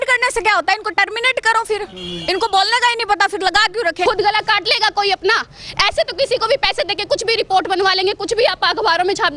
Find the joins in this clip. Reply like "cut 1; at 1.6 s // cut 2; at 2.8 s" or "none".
cut 1; at 4.0 s